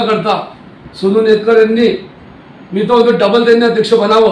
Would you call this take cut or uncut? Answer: uncut